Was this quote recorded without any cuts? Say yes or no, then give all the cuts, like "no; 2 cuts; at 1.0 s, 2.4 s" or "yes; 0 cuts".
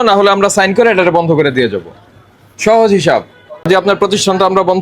no; 1 cut; at 3.7 s